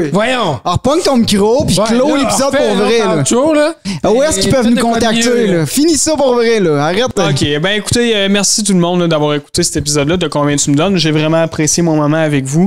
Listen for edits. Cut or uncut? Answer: cut